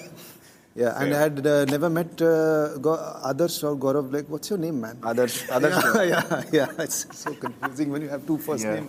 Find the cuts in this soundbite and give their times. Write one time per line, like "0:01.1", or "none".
none